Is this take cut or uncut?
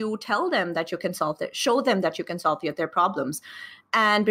uncut